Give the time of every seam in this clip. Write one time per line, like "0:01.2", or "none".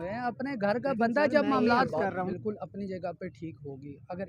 0:02.3